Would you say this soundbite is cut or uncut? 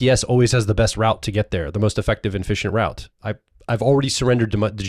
uncut